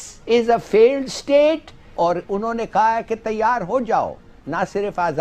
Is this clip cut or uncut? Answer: cut